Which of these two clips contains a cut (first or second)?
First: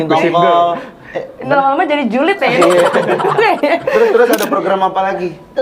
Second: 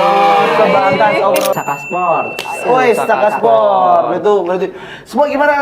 second